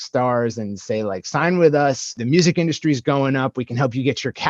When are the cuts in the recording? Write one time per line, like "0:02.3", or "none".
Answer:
0:02.1

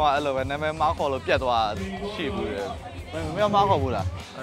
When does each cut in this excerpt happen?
0:03.1

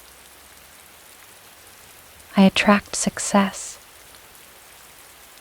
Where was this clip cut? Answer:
0:02.3
0:03.6

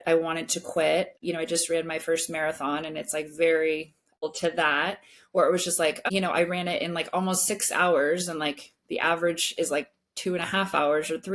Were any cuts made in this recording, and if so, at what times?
0:01.2
0:04.2
0:06.0

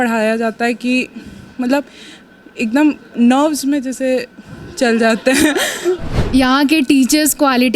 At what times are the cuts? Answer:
0:06.1

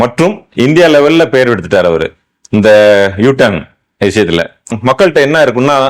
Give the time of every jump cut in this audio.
0:04.7

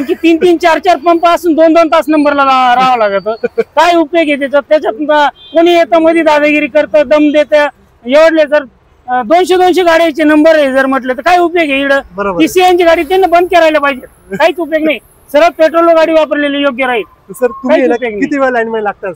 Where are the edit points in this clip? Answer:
none

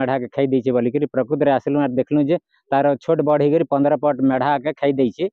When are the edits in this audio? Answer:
none

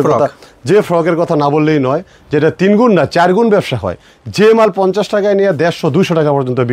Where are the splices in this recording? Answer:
none

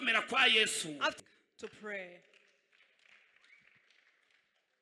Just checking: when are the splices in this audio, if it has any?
0:01.1

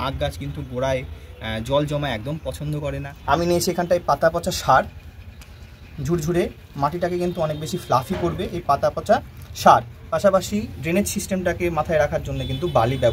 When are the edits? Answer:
0:03.1

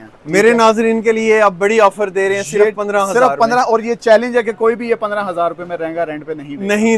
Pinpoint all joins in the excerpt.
none

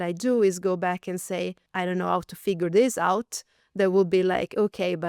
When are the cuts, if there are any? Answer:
0:01.6

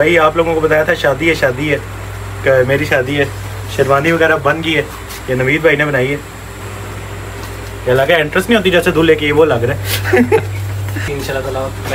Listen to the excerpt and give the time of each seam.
0:06.6
0:11.0

